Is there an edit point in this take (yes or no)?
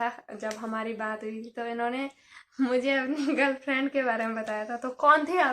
no